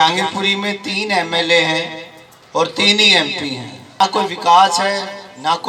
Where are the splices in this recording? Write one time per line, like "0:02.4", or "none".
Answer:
0:04.0